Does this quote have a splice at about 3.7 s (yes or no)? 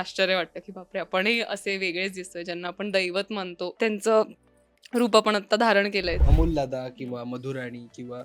yes